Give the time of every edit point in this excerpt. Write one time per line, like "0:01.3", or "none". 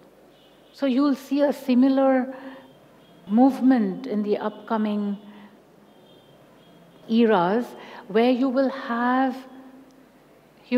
none